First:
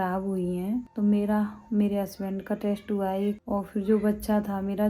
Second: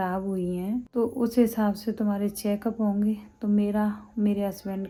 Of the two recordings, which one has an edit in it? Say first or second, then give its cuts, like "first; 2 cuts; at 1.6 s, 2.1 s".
first; 2 cuts; at 0.9 s, 3.4 s